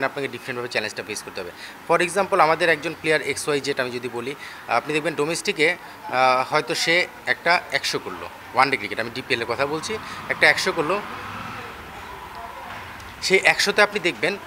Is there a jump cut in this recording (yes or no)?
no